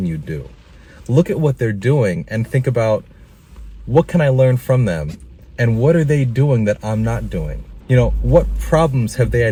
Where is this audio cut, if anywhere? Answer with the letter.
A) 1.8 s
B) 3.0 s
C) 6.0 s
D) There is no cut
D